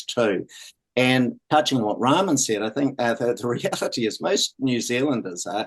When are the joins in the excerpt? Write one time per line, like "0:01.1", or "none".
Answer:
0:01.4